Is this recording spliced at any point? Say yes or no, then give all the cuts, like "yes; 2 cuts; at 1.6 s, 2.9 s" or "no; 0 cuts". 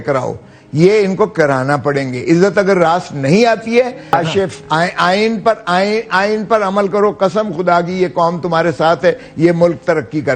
yes; 1 cut; at 4.1 s